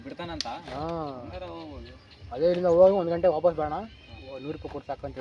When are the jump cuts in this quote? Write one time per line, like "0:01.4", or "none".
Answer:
none

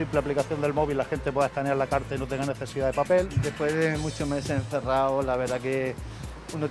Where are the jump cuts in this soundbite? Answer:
0:03.4

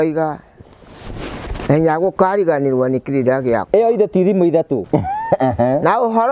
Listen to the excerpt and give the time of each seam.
0:04.8

